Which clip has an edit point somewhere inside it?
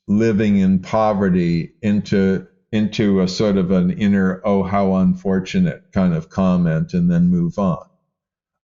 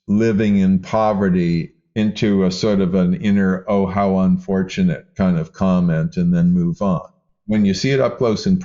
second; 2 cuts; at 1.7 s, 7.3 s

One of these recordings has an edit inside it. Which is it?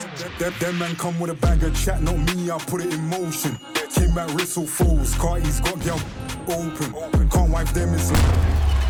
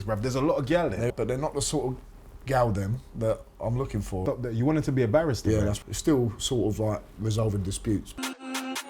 second; 4 cuts; at 1.1 s, 4.2 s, 5.8 s, 8.1 s

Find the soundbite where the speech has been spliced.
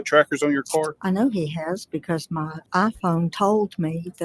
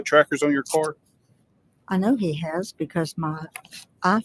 first; 2 cuts; at 1.0 s, 2.6 s

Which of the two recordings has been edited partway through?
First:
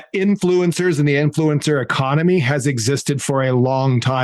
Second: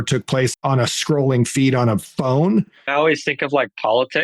second; 1 cut; at 2.9 s

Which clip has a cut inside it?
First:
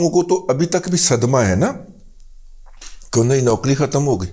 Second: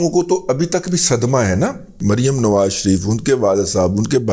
second; 1 cut; at 2.0 s

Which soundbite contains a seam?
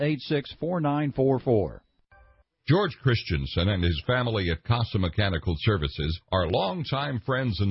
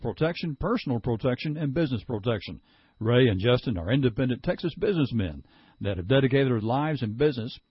first; 1 cut; at 1.9 s

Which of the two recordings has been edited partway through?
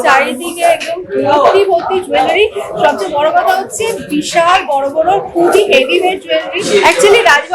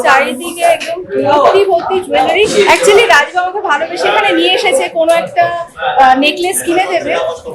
second; 1 cut; at 2.5 s

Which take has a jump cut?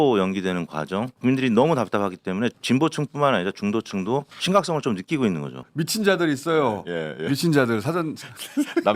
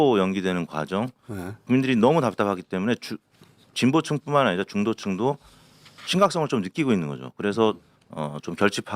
first; 4 cuts; at 1.1 s, 2.6 s, 4.3 s, 5.6 s

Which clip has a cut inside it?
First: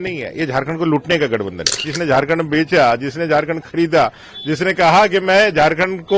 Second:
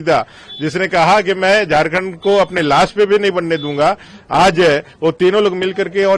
first; 1 cut; at 1.9 s

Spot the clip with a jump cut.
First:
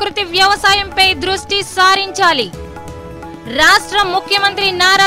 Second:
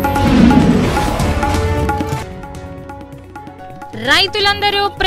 second; 2 cuts; at 2.2 s, 3.9 s

